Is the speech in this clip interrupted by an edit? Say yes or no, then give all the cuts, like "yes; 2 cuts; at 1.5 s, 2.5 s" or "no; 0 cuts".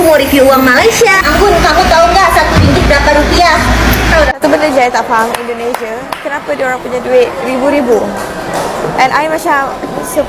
yes; 1 cut; at 4.4 s